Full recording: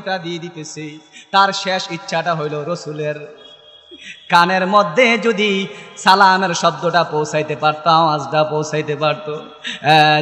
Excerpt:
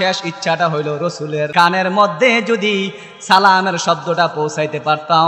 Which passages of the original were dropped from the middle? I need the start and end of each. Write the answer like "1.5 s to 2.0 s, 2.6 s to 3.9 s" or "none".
3.2 s to 4.3 s